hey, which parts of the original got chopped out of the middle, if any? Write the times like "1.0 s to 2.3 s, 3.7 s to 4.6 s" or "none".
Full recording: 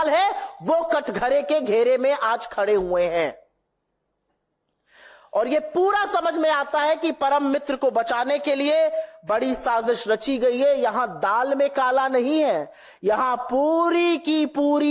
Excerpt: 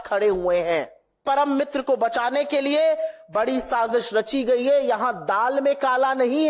3.7 s to 7.2 s